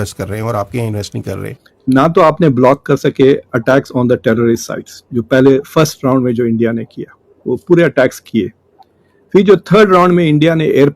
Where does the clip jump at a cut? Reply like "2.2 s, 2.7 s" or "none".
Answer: 1.3 s